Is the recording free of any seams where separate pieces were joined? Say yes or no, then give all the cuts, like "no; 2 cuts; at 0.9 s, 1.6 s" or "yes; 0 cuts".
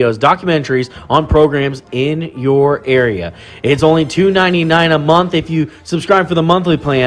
no; 1 cut; at 3.9 s